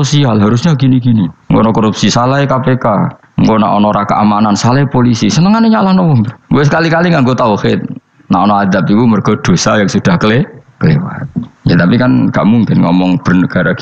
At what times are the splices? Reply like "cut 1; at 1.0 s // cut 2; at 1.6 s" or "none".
cut 1; at 1.4 s // cut 2; at 3.2 s

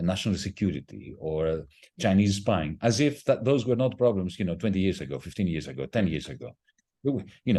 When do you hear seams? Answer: none

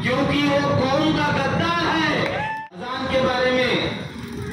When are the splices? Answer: cut 1; at 2.5 s

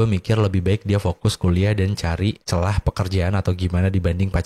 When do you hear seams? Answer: cut 1; at 2.4 s

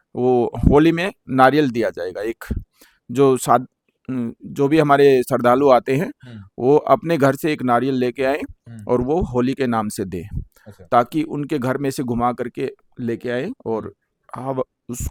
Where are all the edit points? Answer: none

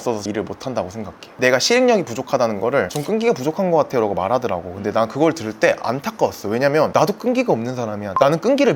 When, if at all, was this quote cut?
cut 1; at 1.4 s

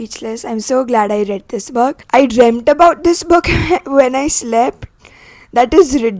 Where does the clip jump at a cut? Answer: cut 1; at 2.0 s

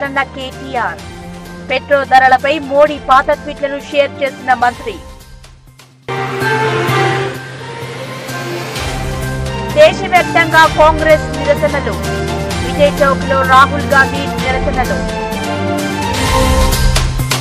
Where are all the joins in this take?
none

